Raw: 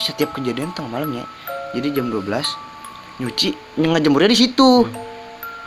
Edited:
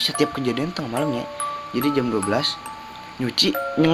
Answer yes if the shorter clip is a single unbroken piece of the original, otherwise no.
yes